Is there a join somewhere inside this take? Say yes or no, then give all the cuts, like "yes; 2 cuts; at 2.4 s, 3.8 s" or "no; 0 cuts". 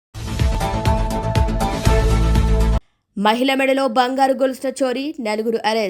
yes; 1 cut; at 2.7 s